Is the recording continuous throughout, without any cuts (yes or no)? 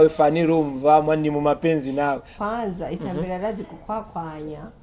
no